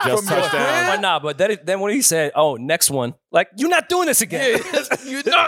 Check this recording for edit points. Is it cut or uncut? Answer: uncut